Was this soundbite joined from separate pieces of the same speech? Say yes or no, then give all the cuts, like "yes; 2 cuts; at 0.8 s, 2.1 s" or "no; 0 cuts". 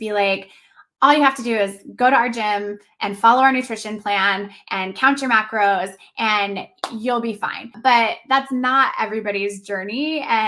no; 0 cuts